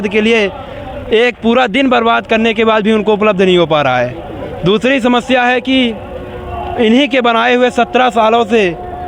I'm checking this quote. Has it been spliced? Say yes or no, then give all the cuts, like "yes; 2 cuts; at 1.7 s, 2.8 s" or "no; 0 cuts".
no; 0 cuts